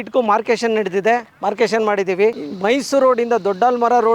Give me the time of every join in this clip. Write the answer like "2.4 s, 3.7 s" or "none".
2.3 s